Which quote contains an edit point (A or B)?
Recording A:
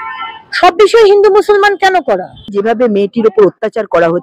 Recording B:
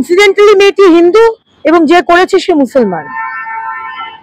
A